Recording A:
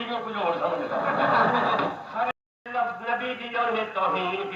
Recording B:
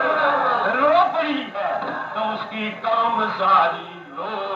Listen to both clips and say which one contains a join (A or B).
A